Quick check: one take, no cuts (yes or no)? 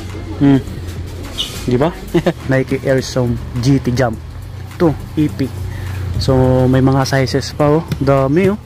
no